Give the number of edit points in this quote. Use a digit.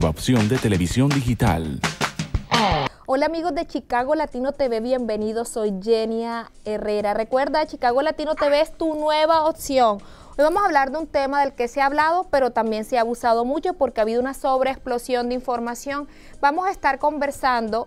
2